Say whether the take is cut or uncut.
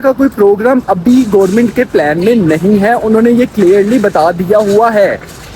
uncut